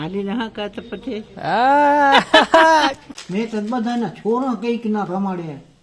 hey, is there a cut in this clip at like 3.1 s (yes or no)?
yes